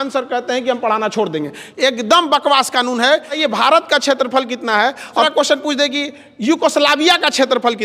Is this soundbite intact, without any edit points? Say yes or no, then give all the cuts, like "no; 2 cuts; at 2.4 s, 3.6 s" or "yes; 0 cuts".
no; 2 cuts; at 3.4 s, 5.2 s